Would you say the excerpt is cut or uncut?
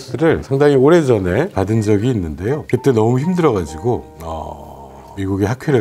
uncut